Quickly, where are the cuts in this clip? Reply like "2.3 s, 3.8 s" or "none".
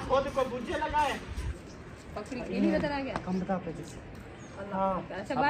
1.5 s